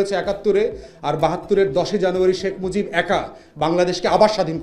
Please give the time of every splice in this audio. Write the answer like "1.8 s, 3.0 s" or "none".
none